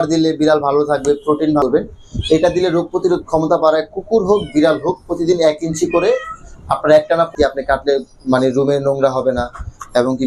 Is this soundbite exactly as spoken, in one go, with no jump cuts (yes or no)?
no